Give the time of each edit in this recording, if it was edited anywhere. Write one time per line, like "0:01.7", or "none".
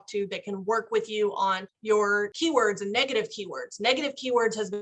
0:02.1